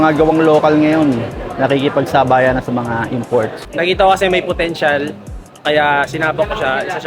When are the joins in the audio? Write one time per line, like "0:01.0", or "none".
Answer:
0:03.6